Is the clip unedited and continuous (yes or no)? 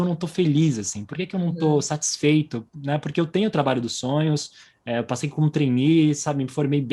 yes